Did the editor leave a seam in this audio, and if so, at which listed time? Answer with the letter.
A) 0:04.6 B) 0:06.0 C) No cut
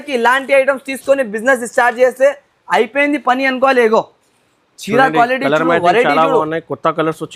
C